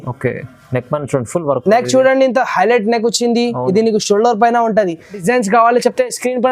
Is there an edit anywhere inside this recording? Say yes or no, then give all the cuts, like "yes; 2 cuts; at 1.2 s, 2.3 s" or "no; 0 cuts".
yes; 1 cut; at 5.2 s